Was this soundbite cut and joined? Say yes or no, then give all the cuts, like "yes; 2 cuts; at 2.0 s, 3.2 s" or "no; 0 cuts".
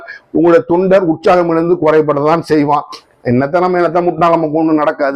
no; 0 cuts